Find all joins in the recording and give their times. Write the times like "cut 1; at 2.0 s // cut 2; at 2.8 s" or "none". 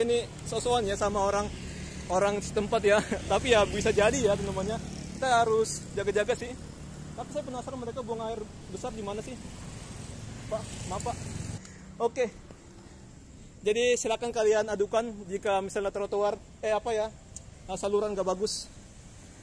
cut 1; at 11.5 s